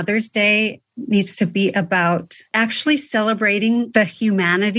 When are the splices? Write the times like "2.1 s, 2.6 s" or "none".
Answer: 2.5 s, 3.9 s